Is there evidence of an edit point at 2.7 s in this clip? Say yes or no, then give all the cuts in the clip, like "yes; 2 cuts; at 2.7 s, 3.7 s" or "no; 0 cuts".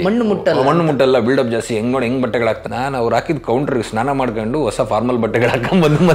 yes; 1 cut; at 2.7 s